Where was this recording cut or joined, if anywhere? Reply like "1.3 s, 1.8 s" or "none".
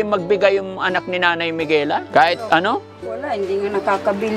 2.1 s

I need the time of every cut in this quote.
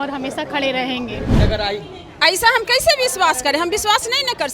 1.3 s

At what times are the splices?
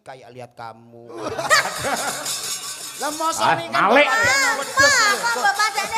none

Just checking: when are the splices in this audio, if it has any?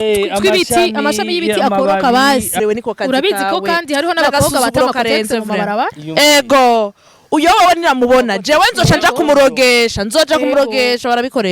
2.6 s

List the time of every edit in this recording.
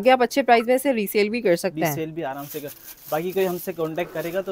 none

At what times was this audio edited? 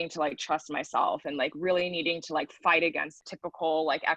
3.2 s

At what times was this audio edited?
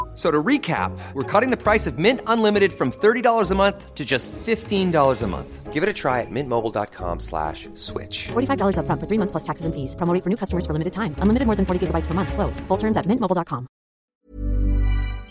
14.0 s

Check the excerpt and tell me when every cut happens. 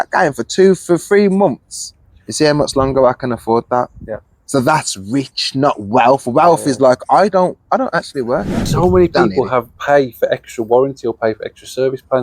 8.6 s

